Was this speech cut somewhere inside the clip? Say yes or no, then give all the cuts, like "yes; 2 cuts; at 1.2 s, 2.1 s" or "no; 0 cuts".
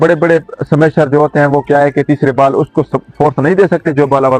no; 0 cuts